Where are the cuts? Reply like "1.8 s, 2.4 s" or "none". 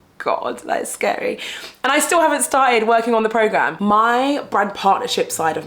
3.7 s